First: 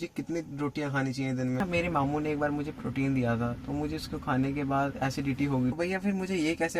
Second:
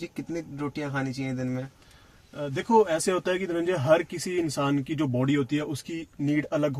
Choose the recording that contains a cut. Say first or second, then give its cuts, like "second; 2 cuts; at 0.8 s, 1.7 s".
first; 2 cuts; at 1.6 s, 5.8 s